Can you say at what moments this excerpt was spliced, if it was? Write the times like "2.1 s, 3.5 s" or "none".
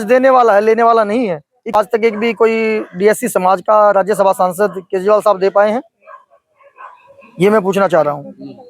1.7 s